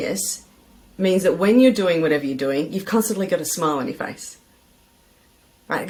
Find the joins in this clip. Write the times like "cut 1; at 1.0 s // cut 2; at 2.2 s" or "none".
none